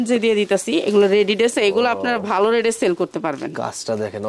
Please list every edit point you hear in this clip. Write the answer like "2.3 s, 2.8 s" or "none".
1.5 s